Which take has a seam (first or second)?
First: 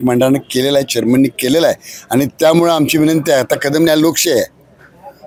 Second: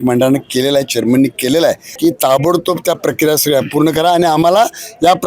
second